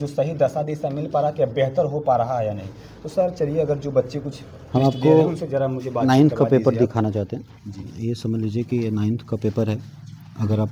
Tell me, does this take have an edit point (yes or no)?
no